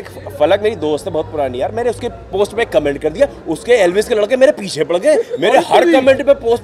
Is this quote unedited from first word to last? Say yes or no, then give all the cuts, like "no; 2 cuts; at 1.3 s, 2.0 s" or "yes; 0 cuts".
yes; 0 cuts